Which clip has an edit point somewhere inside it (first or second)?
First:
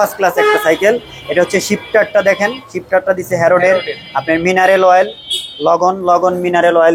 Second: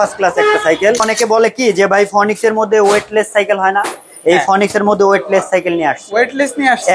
second